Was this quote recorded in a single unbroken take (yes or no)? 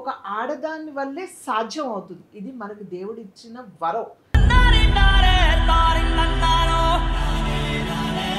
no